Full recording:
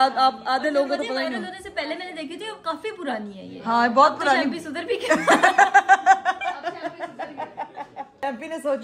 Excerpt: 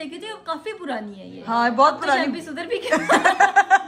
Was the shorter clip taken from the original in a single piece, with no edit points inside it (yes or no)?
yes